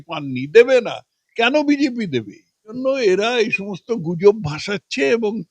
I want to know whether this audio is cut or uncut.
cut